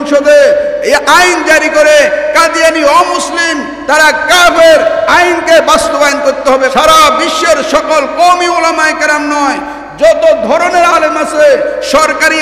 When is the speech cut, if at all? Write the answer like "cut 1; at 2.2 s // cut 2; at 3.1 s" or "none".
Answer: cut 1; at 6.7 s